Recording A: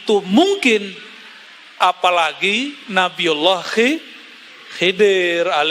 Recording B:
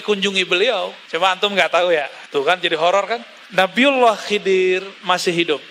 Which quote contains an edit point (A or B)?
B